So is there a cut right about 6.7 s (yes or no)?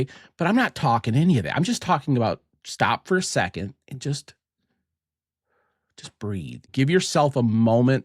yes